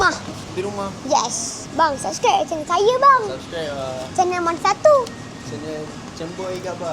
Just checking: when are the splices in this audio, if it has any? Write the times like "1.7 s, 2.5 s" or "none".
1.6 s, 4.0 s